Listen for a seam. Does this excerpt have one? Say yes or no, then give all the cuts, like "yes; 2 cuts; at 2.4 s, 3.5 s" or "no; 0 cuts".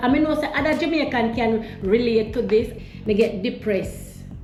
no; 0 cuts